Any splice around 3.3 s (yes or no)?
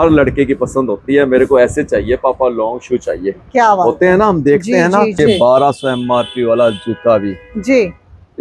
no